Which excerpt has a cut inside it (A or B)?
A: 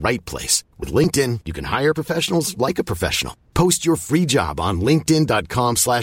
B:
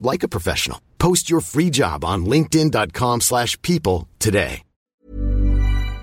B